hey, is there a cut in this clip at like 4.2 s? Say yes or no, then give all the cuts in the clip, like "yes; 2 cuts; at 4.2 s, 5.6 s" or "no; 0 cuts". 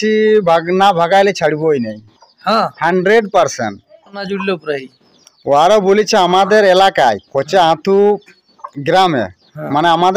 yes; 1 cut; at 4.2 s